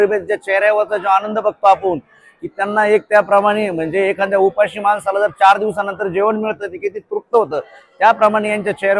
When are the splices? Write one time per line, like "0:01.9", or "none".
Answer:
none